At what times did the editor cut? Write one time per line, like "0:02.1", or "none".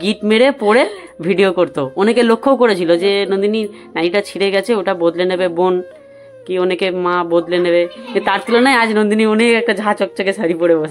none